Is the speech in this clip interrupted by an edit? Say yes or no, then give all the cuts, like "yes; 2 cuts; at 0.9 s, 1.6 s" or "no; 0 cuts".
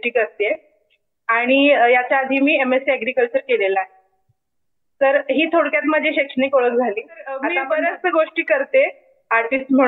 yes; 1 cut; at 7.5 s